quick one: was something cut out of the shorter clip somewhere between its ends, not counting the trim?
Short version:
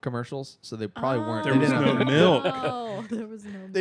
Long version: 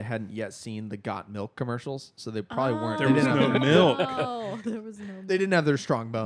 no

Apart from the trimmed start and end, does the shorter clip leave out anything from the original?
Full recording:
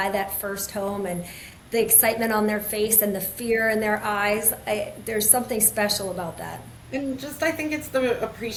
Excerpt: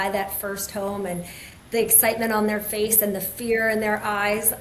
no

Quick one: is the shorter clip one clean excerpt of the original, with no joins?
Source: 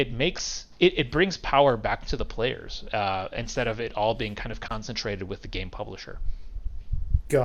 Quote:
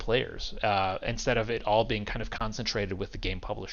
yes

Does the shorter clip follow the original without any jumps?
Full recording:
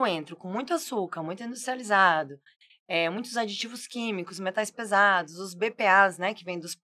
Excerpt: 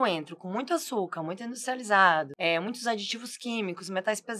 no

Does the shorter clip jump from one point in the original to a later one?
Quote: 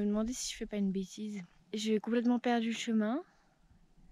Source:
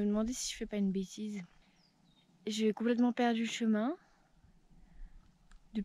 yes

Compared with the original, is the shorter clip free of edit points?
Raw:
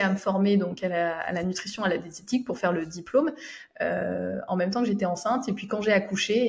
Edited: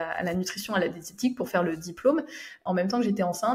no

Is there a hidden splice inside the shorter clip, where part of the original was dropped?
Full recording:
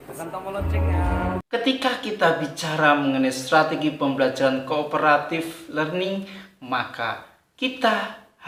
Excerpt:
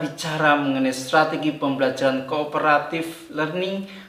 no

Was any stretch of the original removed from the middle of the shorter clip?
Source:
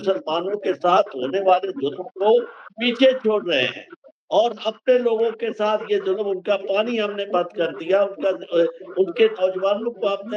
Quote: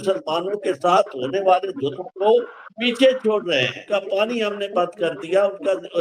yes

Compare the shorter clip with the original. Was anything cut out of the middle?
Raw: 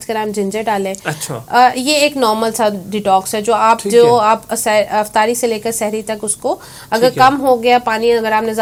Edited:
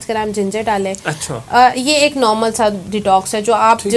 no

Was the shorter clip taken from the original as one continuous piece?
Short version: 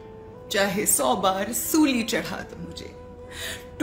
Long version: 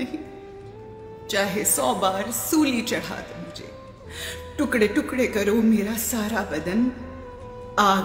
yes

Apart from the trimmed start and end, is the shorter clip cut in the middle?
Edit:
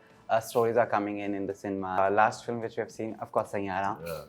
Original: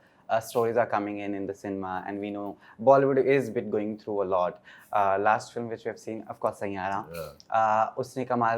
yes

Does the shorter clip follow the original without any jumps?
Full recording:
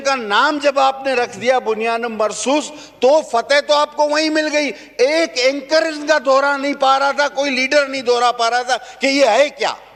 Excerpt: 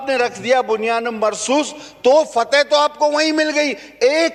yes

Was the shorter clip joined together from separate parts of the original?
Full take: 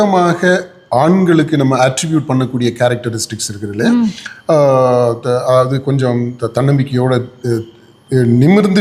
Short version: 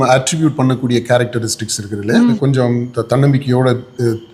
yes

